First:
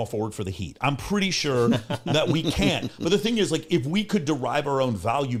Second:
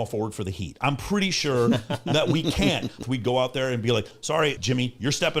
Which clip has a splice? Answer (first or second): second